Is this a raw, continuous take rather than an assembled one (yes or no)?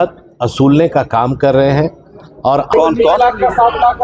no